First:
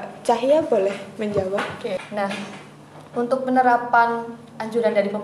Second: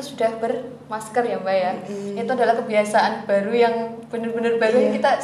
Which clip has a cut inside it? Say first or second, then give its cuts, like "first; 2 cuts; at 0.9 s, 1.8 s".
first; 1 cut; at 2.1 s